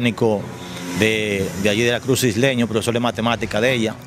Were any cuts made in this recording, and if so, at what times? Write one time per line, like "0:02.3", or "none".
none

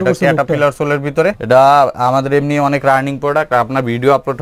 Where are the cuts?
0:01.4

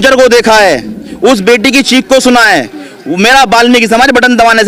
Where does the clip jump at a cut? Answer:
none

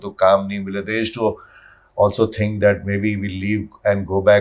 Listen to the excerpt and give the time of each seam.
none

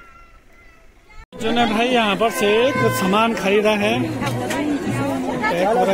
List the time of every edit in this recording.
0:01.3

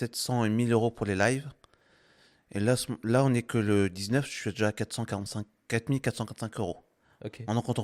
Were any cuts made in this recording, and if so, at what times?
none

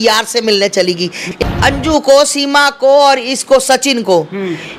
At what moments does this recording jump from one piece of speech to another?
0:01.3

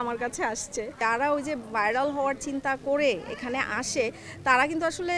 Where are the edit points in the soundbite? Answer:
0:01.0

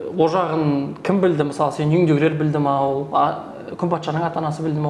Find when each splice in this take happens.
none

